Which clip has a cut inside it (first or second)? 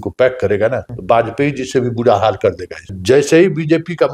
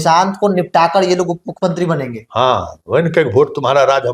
first